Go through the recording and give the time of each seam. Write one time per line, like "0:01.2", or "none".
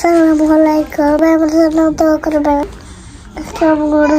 0:01.2
0:02.6

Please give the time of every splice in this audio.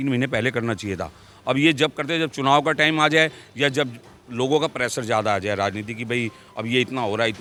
none

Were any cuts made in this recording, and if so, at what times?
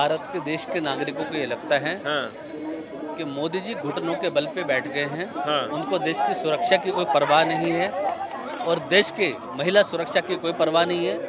none

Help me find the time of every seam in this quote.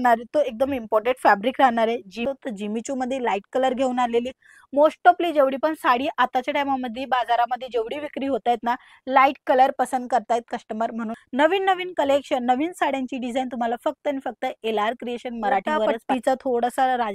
0:02.2
0:11.1
0:16.0

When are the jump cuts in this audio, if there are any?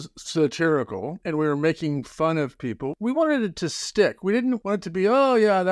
0:01.2
0:02.9
0:04.6

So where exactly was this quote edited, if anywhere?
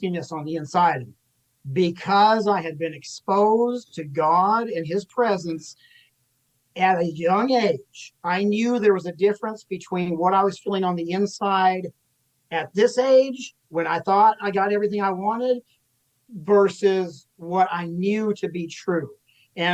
none

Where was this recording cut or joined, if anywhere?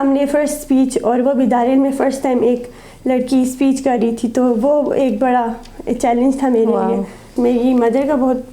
0:07.3

